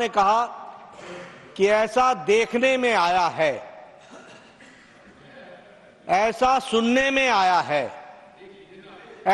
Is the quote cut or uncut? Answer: uncut